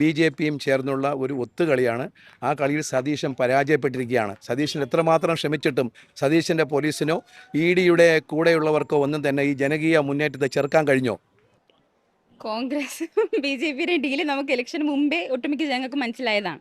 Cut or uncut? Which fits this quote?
uncut